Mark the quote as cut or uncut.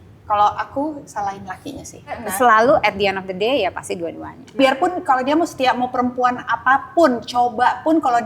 cut